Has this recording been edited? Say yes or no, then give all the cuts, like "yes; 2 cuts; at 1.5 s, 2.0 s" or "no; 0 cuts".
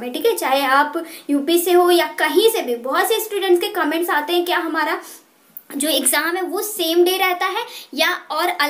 no; 0 cuts